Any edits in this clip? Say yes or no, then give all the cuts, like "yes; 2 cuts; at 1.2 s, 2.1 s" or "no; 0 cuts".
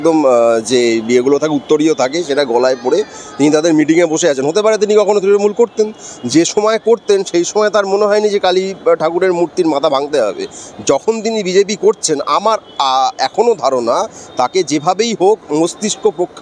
no; 0 cuts